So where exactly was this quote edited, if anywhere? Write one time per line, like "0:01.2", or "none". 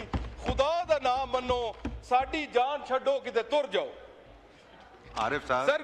none